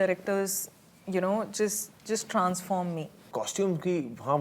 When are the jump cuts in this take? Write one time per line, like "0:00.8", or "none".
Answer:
0:03.3